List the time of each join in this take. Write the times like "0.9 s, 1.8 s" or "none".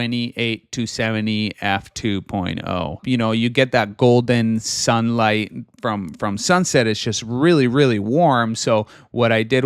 2.9 s

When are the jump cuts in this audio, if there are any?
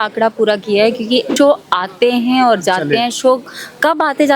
1.3 s

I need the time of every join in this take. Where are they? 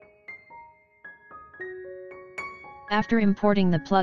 2.9 s

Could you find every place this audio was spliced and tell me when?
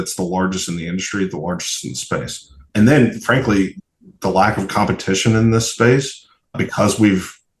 2.7 s, 3.8 s, 6.6 s

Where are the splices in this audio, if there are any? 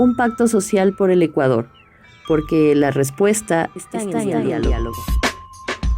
5.0 s

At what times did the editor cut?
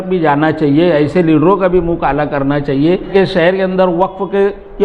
3.1 s

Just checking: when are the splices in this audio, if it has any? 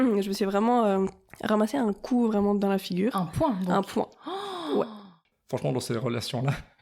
1.3 s, 5.3 s

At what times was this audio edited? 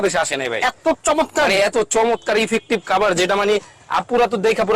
none

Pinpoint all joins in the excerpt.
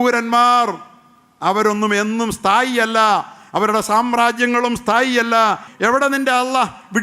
5.7 s

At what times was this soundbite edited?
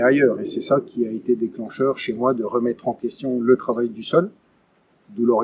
none

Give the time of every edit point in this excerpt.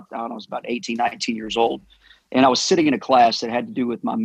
none

